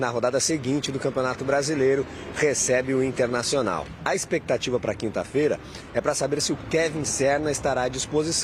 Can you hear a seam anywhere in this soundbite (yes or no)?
yes